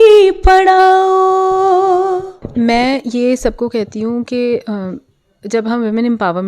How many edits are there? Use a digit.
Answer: 1